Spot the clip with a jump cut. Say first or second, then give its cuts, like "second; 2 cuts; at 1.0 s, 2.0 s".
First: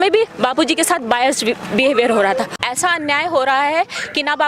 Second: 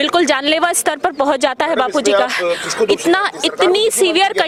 first; 1 cut; at 2.6 s